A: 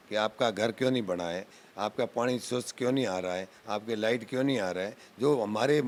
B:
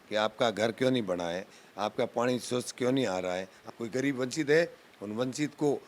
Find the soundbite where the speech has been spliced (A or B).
B